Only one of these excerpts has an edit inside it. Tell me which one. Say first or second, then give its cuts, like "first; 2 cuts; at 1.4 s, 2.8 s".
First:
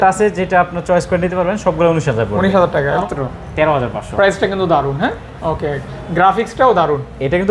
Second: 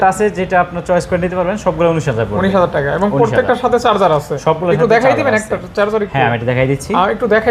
first; 1 cut; at 3.0 s